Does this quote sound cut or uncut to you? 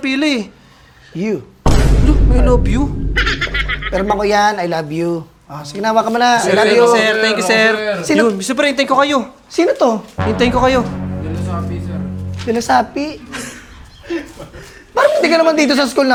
uncut